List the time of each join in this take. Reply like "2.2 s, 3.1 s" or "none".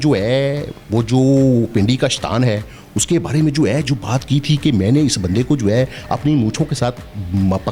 none